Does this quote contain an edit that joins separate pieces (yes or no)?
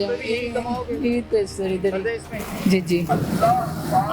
no